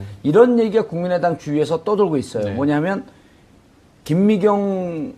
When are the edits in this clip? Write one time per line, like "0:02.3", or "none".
0:00.9